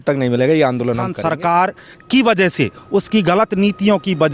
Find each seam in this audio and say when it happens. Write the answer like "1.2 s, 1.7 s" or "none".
1.1 s